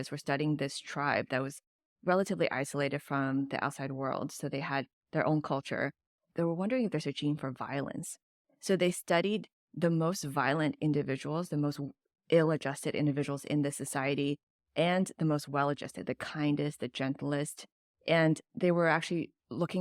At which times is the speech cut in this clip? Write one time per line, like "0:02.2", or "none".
0:06.3

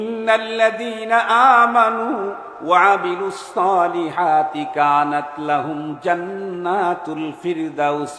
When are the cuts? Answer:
none

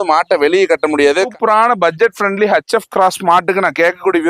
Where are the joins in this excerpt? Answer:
0:01.3

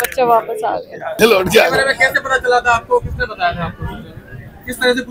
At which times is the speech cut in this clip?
0:01.2

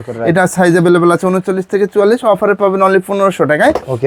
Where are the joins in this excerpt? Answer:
none

